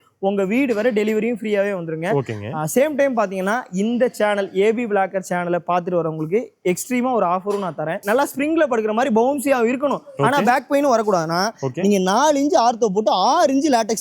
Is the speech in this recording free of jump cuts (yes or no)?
no